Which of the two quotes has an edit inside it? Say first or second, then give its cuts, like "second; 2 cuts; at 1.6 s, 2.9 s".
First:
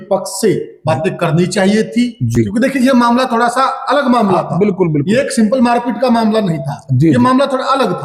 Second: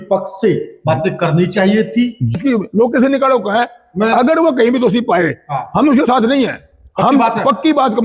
second; 1 cut; at 2.3 s